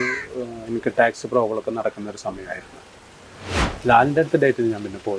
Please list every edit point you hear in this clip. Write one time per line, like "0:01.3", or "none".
0:03.5